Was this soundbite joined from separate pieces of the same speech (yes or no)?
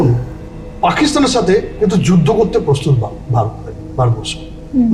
no